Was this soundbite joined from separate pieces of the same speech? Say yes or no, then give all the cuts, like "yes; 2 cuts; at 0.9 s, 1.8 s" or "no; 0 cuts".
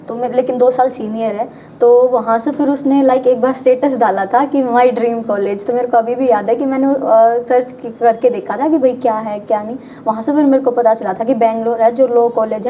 no; 0 cuts